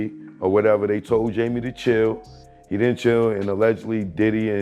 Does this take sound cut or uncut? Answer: uncut